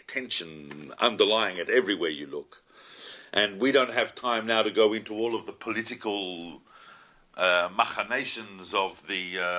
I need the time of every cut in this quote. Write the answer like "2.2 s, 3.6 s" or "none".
none